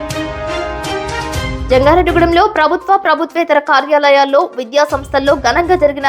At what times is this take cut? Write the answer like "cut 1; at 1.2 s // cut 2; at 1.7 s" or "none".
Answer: cut 1; at 1.6 s